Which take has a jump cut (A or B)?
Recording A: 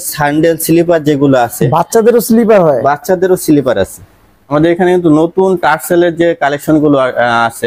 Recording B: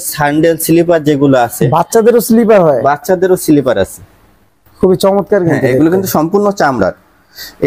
A